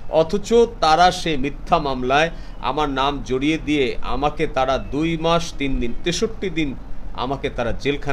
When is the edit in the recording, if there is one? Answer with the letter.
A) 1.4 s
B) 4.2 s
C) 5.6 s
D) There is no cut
D